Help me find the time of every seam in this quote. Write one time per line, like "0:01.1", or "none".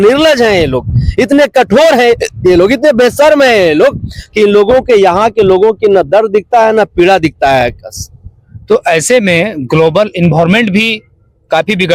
none